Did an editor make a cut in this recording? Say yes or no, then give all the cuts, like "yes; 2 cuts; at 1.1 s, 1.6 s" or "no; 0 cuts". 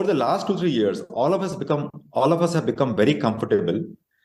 no; 0 cuts